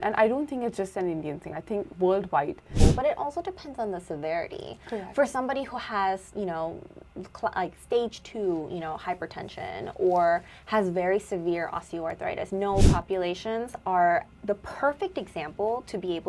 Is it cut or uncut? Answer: cut